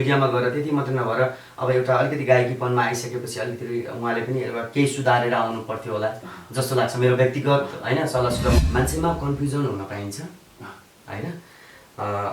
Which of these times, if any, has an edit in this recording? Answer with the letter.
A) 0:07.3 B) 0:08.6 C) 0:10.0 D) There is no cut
B